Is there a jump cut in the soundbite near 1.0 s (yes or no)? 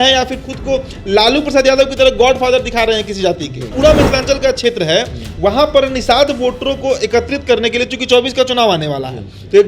no